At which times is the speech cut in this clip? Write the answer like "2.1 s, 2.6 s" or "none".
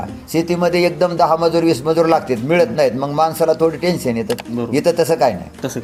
none